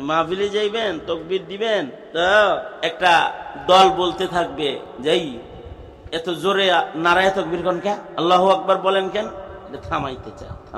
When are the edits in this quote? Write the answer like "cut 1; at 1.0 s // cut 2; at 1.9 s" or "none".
cut 1; at 2.0 s // cut 2; at 2.7 s // cut 3; at 4.9 s // cut 4; at 8.1 s